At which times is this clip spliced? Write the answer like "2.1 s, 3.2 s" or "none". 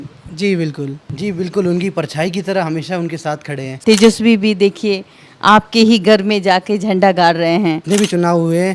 1.0 s, 3.8 s, 7.8 s